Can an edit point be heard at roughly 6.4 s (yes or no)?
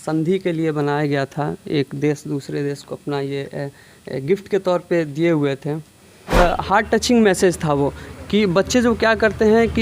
yes